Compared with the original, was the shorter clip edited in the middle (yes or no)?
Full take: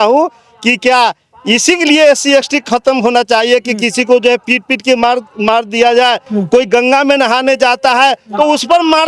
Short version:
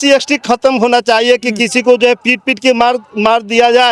no